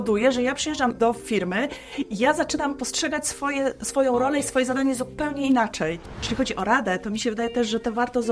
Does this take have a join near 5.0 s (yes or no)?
no